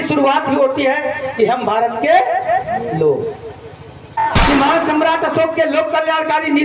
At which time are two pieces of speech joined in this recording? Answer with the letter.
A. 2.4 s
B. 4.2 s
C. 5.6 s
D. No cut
B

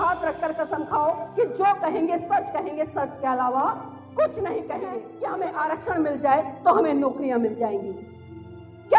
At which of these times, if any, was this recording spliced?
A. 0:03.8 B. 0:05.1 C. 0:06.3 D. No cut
B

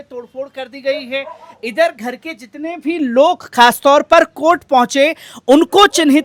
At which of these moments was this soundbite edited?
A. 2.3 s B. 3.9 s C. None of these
C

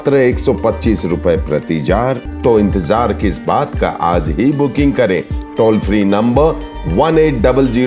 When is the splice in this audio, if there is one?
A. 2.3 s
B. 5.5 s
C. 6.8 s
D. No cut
A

